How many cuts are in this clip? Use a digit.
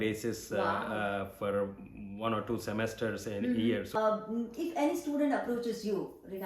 1